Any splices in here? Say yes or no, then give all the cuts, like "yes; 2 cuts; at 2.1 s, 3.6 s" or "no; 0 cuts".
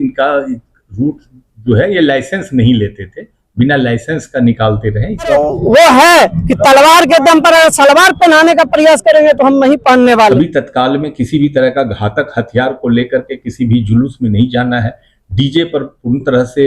yes; 2 cuts; at 5.3 s, 10.3 s